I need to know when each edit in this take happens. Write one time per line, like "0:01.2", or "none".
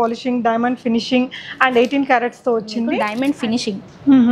0:03.1